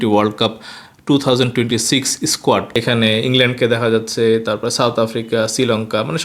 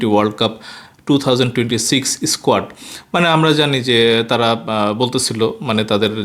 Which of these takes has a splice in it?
first; 1 cut; at 2.7 s

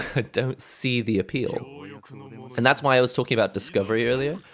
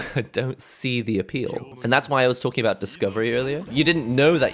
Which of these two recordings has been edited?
second; 2 cuts; at 1.7 s, 3.7 s

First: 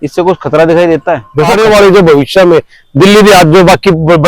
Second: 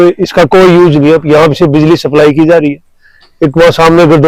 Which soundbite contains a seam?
first; 1 cut; at 1.5 s

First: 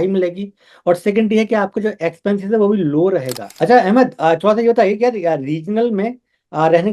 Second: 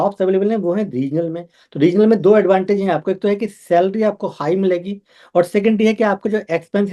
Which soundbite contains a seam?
first; 1 cut; at 3.4 s

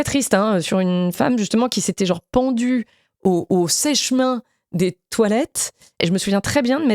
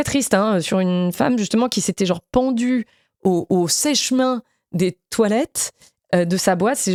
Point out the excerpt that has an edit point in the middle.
first; 1 cut; at 6.0 s

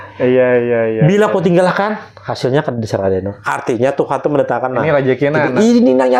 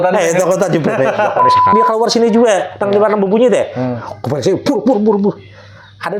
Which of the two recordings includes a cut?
second; 1 cut; at 1.7 s

